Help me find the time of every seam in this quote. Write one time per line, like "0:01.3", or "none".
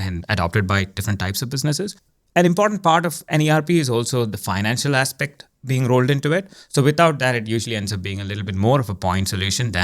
0:01.9